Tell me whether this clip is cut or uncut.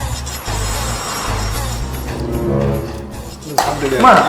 cut